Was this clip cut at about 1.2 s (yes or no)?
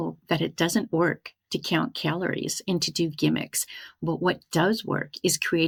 no